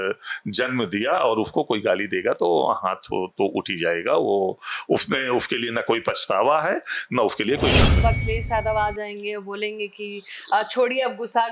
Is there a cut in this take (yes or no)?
yes